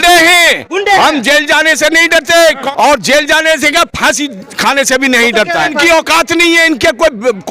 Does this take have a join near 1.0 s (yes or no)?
no